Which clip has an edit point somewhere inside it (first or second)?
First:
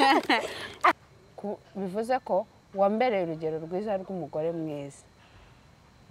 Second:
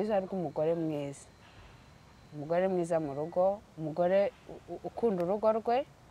first